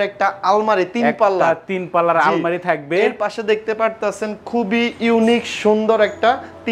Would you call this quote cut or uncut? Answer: uncut